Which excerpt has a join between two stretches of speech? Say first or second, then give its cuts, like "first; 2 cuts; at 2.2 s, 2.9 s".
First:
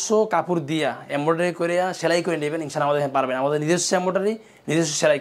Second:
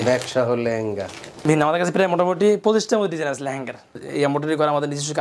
second; 2 cuts; at 1.4 s, 4.0 s